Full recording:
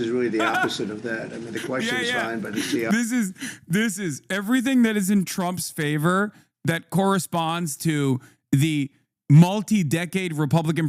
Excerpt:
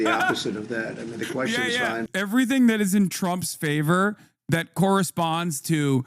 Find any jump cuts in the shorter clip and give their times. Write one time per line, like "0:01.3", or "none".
0:02.1